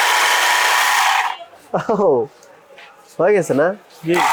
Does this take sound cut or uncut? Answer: uncut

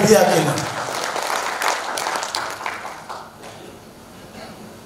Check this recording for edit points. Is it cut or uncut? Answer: uncut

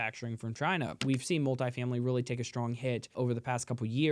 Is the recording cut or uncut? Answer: cut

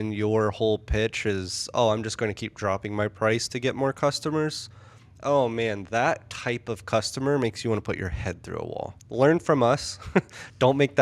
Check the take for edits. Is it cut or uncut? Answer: cut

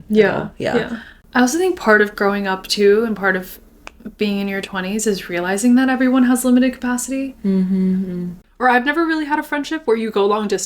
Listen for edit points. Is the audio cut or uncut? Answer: cut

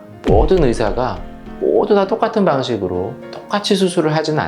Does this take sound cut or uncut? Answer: uncut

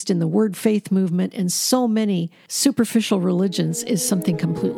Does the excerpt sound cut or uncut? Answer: uncut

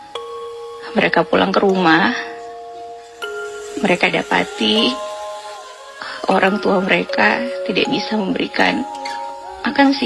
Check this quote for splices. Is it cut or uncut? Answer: cut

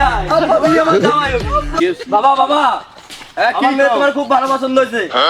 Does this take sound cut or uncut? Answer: cut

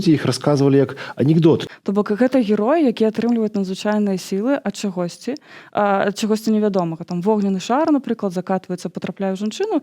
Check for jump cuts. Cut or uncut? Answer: cut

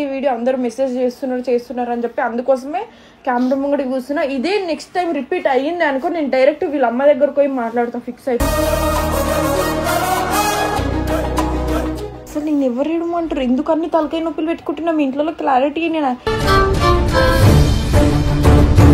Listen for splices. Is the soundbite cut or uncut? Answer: cut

